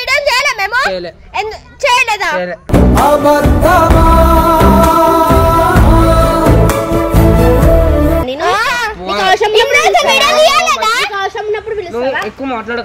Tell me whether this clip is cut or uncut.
uncut